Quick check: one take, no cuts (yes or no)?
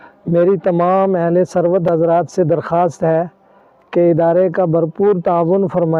yes